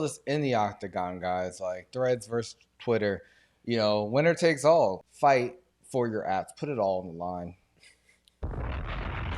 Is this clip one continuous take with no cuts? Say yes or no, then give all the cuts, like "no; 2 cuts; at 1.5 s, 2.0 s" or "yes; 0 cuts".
no; 1 cut; at 5.0 s